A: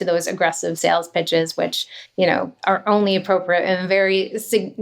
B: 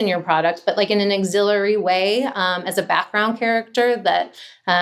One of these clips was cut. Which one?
A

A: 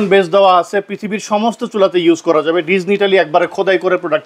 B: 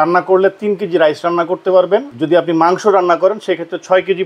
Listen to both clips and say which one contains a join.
B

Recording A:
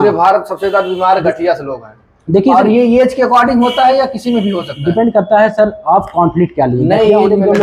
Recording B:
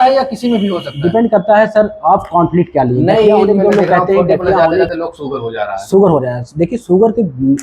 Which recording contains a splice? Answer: B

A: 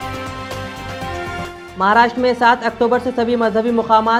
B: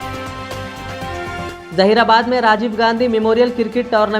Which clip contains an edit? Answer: B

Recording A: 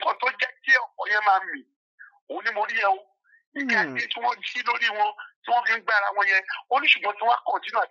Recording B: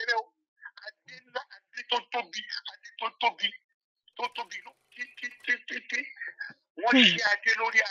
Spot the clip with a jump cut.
B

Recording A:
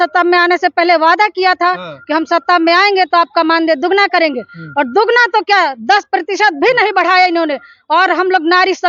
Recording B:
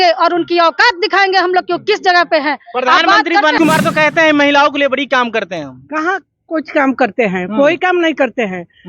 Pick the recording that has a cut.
B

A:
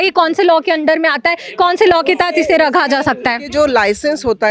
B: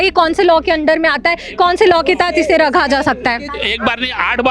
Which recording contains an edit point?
B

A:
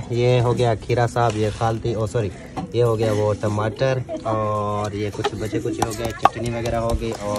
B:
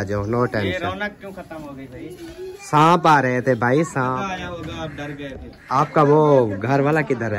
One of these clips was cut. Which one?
B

